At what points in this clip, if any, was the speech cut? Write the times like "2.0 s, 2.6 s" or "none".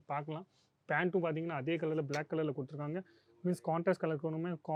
none

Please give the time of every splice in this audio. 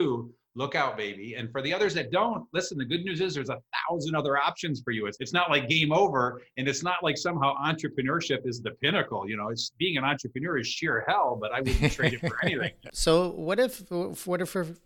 5.1 s, 12.8 s

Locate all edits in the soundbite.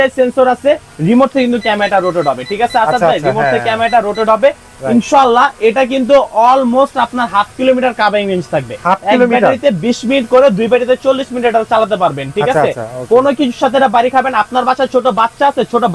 none

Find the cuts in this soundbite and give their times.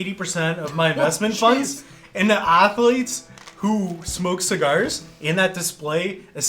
none

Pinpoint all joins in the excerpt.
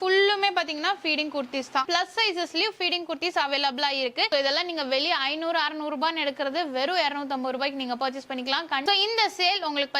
1.8 s, 4.3 s, 8.9 s

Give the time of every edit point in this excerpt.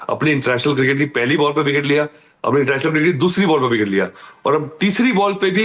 none

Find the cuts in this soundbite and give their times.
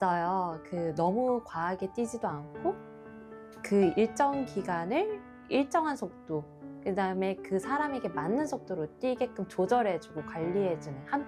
none

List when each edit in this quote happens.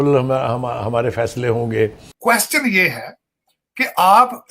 2.1 s

